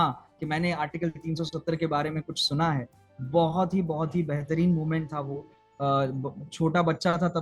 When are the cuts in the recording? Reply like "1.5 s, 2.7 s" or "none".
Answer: none